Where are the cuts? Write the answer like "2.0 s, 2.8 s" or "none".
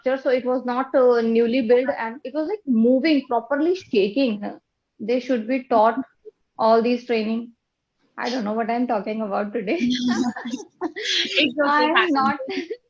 4.6 s

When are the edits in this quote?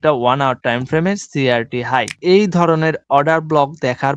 2.1 s

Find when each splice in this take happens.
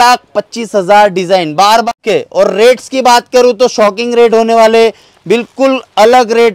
1.9 s

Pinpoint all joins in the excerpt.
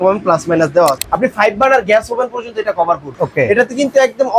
1.0 s, 3.2 s

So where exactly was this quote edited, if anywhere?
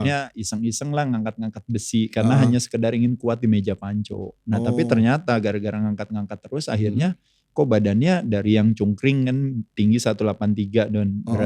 none

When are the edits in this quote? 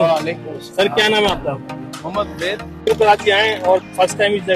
2.9 s

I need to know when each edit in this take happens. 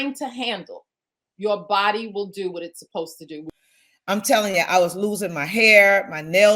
3.5 s

